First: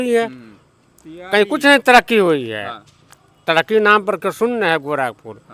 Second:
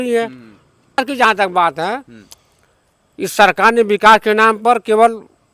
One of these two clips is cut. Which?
second; 1 cut; at 1.0 s

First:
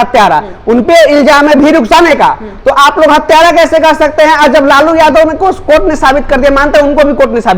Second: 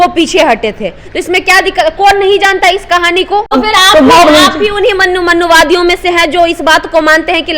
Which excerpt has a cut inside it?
second; 1 cut; at 3.5 s

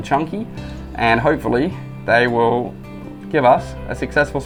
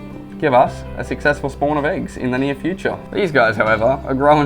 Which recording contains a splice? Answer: second; 1 cut; at 3.0 s

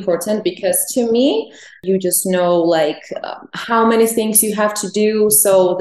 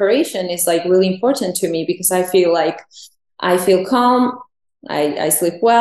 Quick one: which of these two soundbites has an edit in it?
first; 1 cut; at 1.8 s

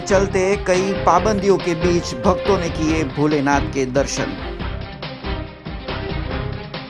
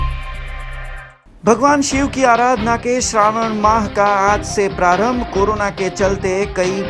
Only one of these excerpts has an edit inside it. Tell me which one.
second; 1 cut; at 1.0 s

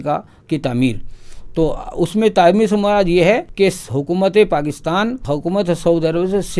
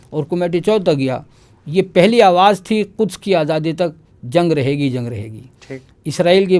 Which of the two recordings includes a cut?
first; 2 cuts; at 3.5 s, 5.2 s

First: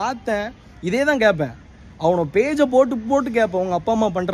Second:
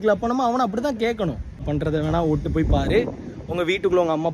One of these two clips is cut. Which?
second; 1 cut; at 1.7 s

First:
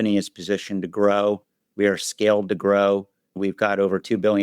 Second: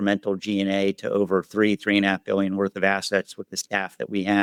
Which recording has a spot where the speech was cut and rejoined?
first; 1 cut; at 3.4 s

